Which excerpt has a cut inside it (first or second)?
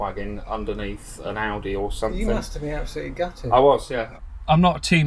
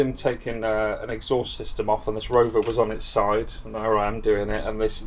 first